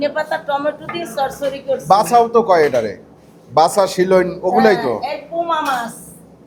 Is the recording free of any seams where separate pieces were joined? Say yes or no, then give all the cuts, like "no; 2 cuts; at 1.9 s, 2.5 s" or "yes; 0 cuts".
yes; 0 cuts